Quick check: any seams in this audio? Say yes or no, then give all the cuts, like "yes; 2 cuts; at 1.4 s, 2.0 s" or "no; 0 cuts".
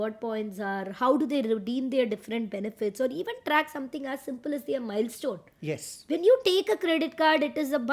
no; 0 cuts